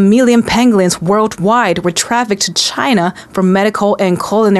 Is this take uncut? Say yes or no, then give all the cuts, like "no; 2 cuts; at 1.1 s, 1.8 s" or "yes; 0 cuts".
yes; 0 cuts